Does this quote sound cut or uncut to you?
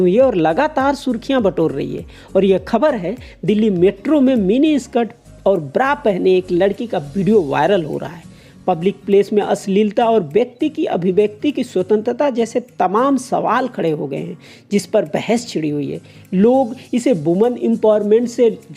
uncut